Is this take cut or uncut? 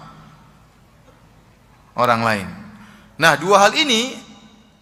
uncut